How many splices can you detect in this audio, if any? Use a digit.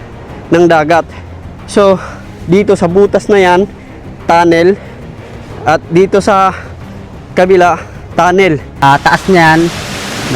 1